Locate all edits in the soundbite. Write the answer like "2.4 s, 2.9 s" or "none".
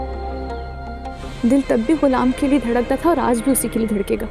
1.2 s